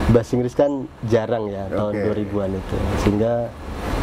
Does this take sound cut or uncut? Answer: uncut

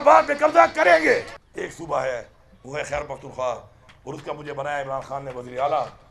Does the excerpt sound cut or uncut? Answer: cut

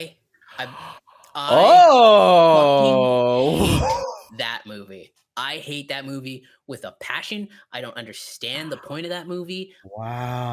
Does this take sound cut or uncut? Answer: uncut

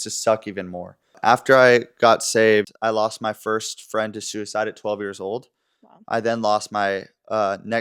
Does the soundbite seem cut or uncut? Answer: cut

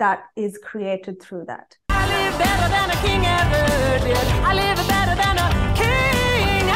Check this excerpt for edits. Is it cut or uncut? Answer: cut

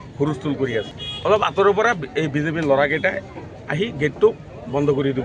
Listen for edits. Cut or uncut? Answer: cut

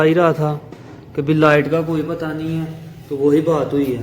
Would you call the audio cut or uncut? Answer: uncut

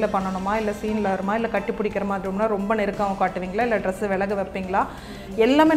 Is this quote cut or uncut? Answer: uncut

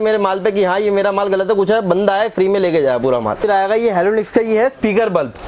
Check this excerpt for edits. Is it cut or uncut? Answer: cut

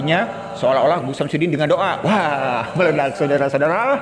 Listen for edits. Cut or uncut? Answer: uncut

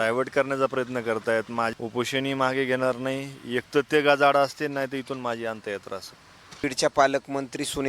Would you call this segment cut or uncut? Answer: cut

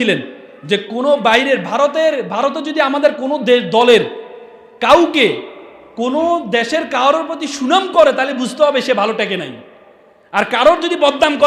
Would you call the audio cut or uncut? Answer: uncut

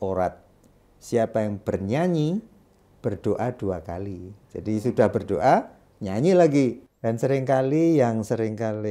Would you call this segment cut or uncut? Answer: cut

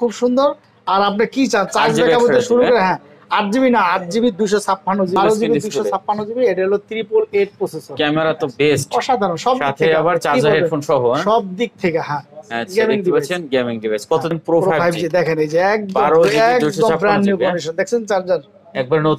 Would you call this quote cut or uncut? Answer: cut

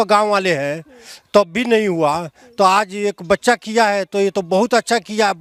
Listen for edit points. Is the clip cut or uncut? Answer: uncut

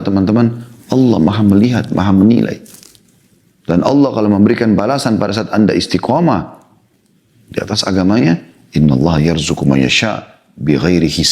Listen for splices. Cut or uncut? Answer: uncut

